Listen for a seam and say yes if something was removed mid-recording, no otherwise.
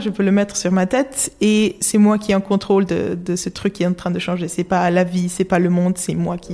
no